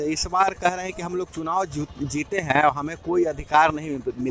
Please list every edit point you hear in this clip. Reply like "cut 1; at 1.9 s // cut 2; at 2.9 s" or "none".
none